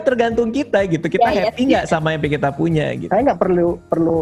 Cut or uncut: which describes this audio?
cut